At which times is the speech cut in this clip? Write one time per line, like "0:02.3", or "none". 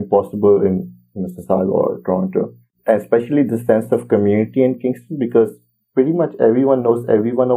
0:02.7